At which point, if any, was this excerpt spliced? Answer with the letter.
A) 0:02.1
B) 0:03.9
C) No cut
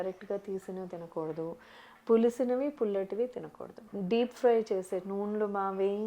B